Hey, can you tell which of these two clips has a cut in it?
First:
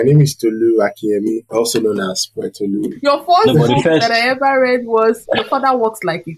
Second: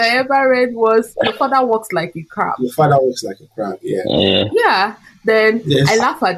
first; 2 cuts; at 1.4 s, 2.9 s

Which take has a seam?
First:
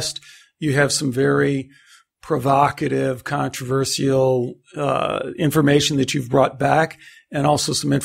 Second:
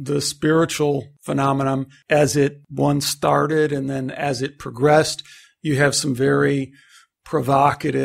second; 2 cuts; at 1.6 s, 2.6 s

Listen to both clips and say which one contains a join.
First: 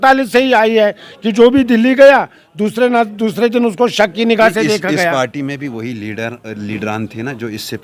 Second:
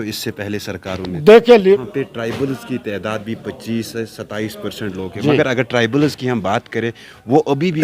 second; 1 cut; at 1.8 s

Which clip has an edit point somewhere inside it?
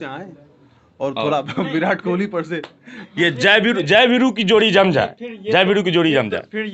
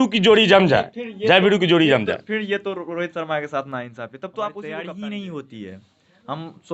second; 1 cut; at 4.7 s

